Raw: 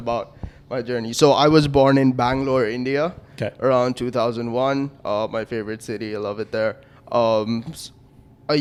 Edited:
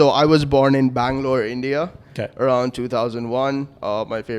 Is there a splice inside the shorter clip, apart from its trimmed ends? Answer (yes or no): no